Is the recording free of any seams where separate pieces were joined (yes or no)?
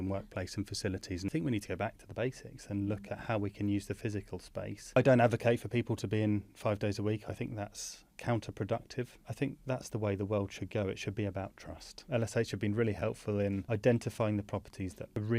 no